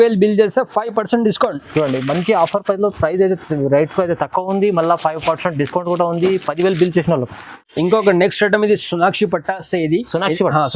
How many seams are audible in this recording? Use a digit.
0